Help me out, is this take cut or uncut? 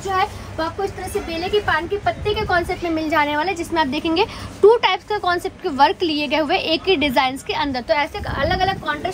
uncut